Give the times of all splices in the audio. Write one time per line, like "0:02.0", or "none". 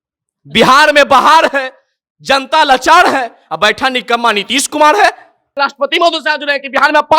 0:05.6